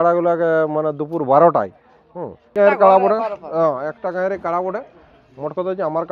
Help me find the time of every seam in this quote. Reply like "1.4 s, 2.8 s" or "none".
2.5 s